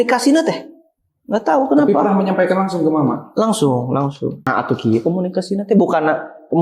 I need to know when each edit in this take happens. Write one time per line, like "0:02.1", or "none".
0:04.4